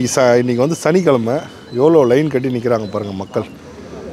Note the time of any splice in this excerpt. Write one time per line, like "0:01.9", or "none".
none

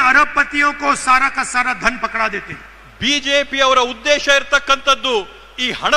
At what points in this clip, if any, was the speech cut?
none

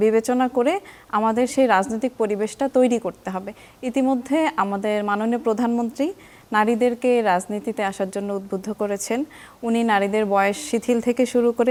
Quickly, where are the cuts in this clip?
none

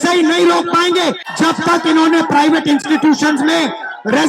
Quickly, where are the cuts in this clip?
0:01.2

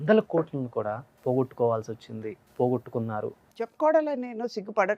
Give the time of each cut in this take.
0:01.1
0:02.4
0:03.4

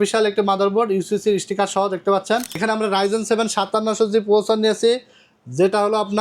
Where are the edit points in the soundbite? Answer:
0:02.5

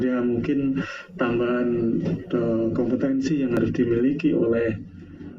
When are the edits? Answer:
none

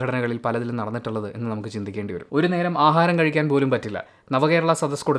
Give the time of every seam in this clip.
0:02.2

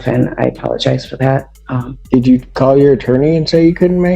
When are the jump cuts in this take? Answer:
0:01.9

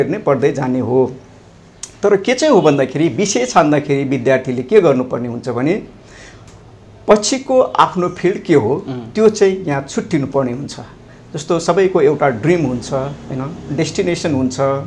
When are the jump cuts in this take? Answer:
none

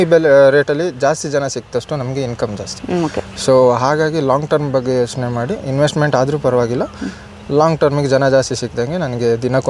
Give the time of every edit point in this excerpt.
none

